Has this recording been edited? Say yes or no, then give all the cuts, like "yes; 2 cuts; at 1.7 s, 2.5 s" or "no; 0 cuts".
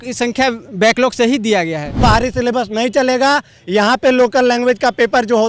yes; 1 cut; at 2.0 s